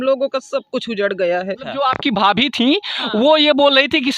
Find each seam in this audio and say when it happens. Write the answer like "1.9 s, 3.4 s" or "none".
1.6 s